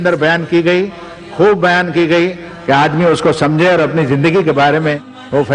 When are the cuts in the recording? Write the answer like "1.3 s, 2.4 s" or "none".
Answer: none